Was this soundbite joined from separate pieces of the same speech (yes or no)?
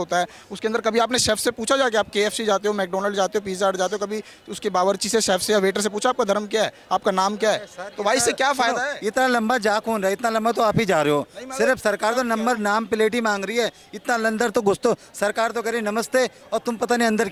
no